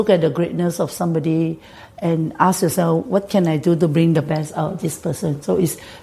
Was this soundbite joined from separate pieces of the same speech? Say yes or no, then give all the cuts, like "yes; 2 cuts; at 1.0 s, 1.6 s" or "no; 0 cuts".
no; 0 cuts